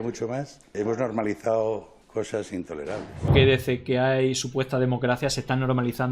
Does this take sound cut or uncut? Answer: cut